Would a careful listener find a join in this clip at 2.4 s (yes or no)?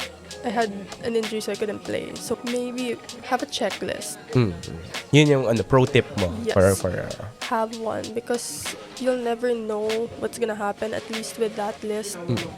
yes